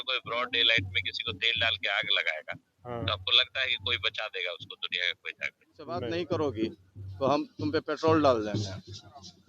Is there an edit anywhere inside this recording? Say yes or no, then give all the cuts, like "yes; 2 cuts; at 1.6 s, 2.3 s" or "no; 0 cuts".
yes; 1 cut; at 6.1 s